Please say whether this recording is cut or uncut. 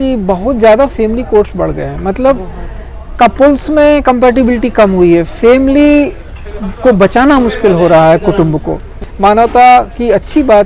cut